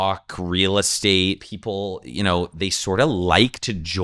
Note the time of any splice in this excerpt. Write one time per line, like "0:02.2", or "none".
0:01.5